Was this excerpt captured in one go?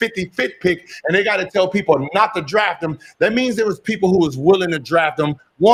yes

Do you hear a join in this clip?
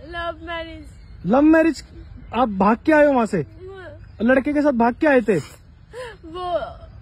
no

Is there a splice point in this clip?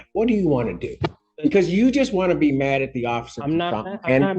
no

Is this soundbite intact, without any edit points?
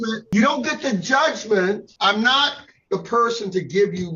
no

